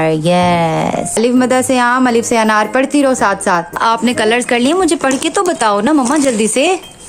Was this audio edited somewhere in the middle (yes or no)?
yes